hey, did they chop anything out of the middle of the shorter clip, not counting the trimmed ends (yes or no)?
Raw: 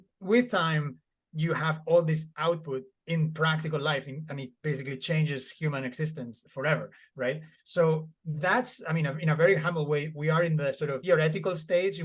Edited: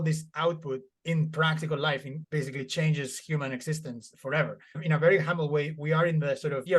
yes